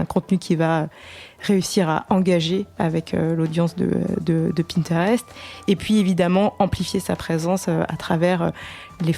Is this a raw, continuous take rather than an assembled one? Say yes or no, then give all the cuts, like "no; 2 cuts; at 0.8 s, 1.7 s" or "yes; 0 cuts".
yes; 0 cuts